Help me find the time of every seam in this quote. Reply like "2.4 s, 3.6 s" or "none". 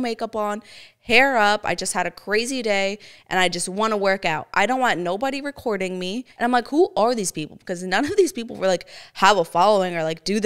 6.3 s